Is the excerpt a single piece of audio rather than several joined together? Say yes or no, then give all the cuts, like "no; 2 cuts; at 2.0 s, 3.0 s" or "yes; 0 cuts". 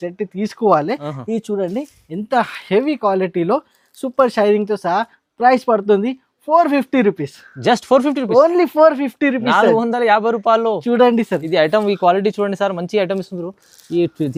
yes; 0 cuts